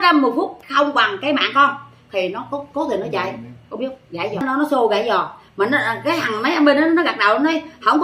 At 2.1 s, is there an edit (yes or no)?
no